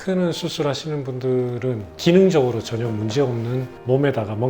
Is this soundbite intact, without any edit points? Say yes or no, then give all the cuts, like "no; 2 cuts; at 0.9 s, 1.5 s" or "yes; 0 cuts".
no; 1 cut; at 1.9 s